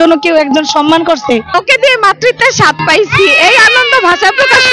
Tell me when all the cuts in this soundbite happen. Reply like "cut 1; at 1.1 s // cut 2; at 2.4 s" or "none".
cut 1; at 1.5 s